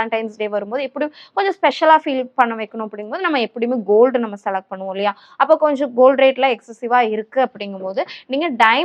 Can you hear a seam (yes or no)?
no